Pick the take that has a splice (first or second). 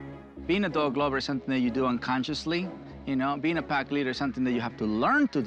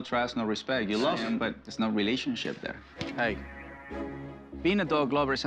second